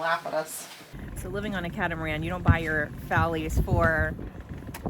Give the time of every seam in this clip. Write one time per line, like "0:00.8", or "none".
0:01.1